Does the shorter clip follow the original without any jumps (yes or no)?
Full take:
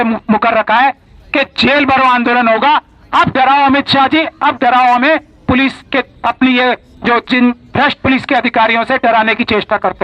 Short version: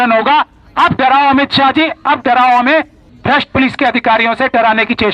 no